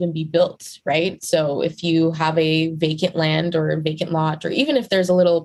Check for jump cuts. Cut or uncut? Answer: uncut